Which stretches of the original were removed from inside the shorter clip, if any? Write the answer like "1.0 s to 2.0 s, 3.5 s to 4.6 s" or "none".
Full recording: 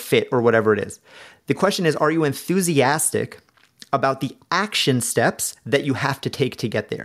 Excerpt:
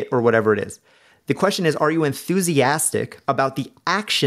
3.4 s to 3.8 s

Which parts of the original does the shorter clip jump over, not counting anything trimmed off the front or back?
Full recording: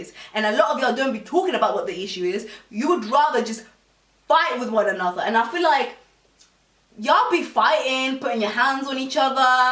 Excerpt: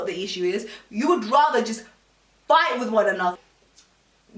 5.2 s to 6.0 s

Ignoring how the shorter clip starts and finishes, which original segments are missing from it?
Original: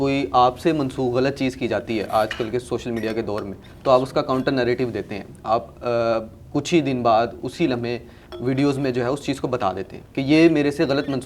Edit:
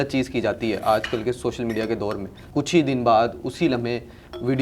3.6 s to 6.4 s

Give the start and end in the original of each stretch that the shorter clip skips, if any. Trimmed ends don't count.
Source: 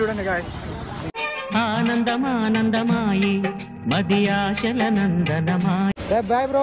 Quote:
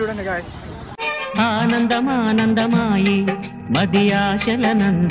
0.9 s to 1.1 s

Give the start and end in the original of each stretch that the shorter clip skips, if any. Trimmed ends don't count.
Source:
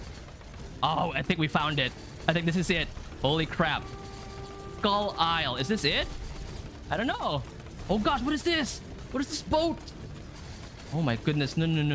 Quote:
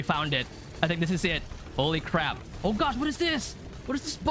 3.9 s to 7.7 s

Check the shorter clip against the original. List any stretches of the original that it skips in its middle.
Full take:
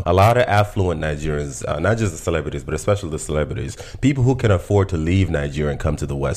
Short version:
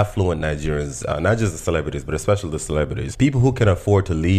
3.6 s to 3.9 s

